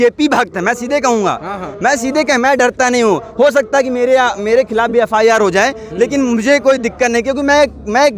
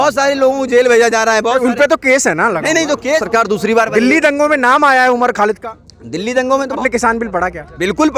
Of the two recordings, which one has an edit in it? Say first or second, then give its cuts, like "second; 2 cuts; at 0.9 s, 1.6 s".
second; 2 cuts; at 3.2 s, 6.8 s